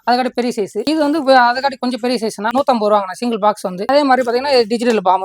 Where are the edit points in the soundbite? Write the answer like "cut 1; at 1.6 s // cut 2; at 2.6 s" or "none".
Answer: cut 1; at 2.5 s // cut 2; at 3.8 s